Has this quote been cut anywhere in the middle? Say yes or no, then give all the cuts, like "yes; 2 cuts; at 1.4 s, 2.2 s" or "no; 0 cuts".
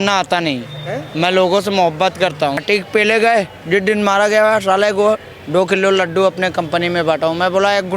yes; 1 cut; at 2.6 s